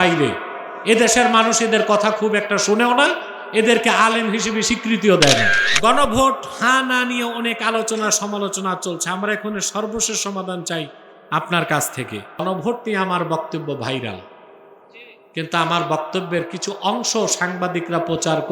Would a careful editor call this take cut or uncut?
cut